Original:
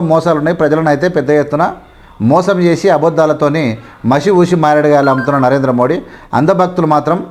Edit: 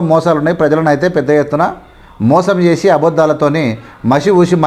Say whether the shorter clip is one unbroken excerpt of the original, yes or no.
yes